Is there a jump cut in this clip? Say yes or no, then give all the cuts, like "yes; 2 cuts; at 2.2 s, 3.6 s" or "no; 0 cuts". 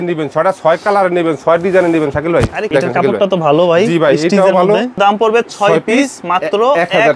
yes; 2 cuts; at 2.7 s, 5.0 s